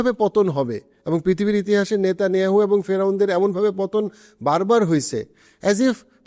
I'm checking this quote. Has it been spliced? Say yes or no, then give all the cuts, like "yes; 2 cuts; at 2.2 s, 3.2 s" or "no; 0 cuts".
no; 0 cuts